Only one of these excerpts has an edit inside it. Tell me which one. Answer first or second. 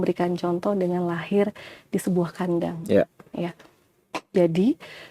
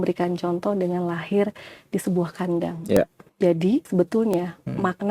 second